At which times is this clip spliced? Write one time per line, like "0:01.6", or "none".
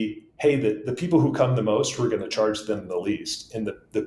none